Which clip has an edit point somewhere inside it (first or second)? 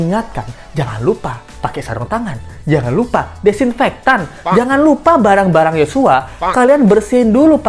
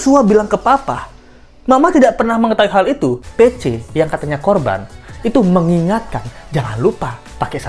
second